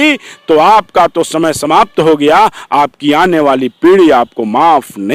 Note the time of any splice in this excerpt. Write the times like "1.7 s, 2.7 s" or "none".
none